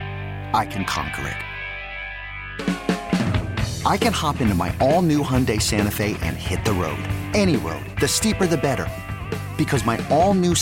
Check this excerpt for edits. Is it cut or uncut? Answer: uncut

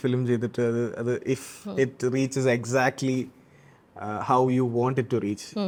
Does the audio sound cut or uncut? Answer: uncut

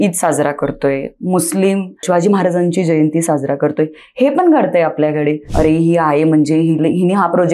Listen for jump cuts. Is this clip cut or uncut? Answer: cut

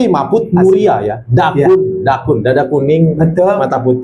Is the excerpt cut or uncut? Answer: uncut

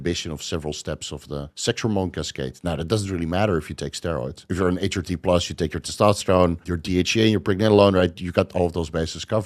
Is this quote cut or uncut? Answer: cut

